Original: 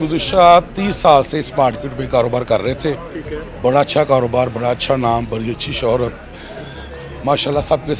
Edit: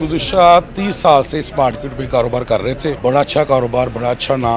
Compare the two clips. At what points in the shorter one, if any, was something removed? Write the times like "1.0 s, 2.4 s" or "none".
3.0 s